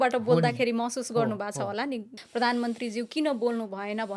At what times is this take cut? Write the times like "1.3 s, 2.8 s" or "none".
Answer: 2.1 s